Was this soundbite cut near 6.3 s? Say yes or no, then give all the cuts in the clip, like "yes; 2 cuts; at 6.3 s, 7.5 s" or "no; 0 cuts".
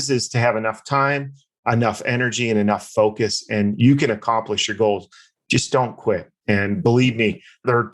yes; 1 cut; at 6.3 s